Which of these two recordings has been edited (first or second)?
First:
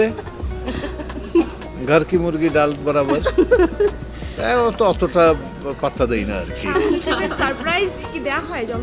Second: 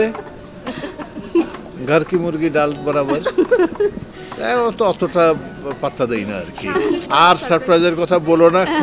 second